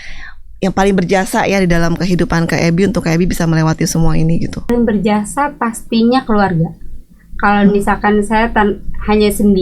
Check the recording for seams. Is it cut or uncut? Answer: cut